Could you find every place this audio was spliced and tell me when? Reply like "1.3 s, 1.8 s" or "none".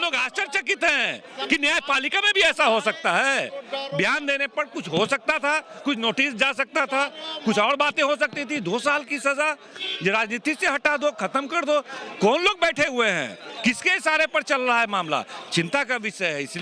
none